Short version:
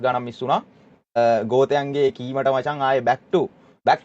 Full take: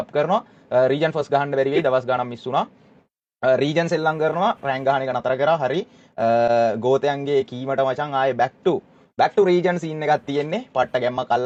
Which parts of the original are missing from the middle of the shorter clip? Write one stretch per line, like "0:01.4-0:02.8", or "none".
0:03.2-0:06.5